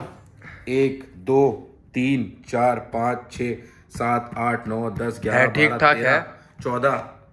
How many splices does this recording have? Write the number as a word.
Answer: zero